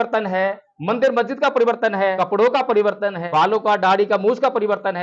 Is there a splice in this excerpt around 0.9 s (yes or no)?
no